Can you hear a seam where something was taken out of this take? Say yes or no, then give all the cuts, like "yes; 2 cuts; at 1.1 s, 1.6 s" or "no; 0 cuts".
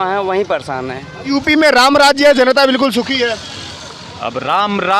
yes; 1 cut; at 1.3 s